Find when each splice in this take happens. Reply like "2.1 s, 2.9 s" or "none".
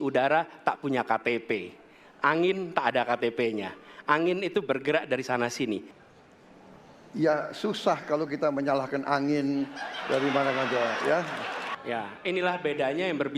6.0 s, 11.7 s